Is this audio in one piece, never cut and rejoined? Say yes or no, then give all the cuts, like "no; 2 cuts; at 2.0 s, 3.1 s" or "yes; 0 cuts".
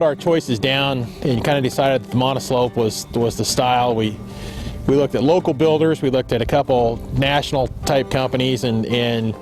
yes; 0 cuts